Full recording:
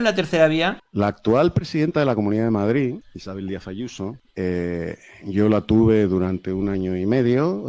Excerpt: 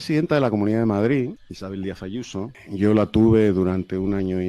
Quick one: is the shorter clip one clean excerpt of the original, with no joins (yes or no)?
no